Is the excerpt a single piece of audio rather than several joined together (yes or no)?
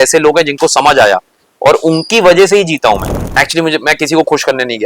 no